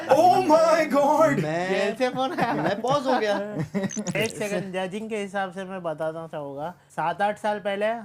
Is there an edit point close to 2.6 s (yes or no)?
no